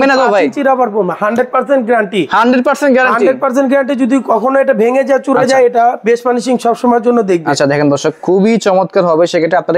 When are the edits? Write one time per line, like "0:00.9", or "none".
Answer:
none